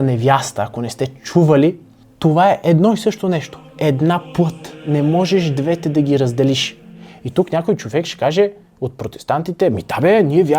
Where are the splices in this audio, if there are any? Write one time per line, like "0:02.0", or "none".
0:06.8